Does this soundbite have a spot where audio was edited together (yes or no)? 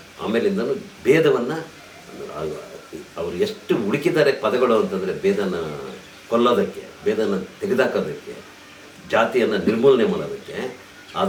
no